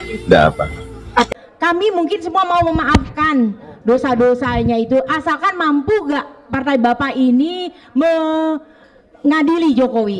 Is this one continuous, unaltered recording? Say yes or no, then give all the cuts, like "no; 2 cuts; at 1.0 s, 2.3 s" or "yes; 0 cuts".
no; 1 cut; at 1.3 s